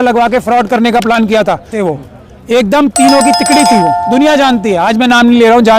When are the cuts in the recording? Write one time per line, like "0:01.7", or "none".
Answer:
0:01.7